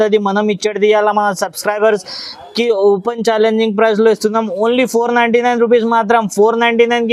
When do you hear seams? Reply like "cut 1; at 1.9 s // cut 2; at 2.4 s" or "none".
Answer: none